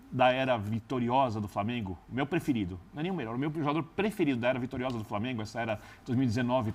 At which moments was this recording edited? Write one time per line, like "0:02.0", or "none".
none